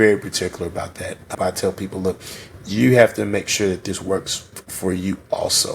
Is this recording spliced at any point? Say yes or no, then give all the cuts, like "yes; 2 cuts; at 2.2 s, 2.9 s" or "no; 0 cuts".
yes; 1 cut; at 1.3 s